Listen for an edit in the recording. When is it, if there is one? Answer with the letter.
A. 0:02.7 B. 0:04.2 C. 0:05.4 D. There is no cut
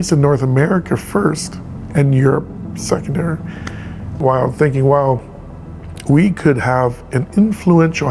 B